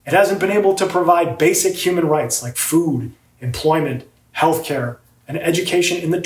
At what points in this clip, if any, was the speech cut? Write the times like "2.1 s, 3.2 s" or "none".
none